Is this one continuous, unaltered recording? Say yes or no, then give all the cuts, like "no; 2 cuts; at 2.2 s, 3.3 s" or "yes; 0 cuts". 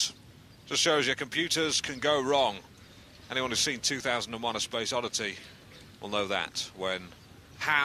yes; 0 cuts